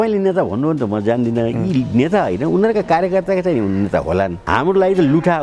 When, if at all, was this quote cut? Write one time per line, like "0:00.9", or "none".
0:04.4